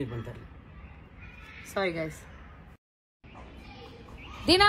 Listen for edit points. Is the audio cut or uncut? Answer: uncut